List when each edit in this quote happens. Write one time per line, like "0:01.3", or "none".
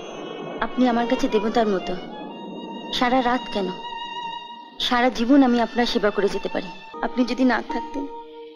0:06.8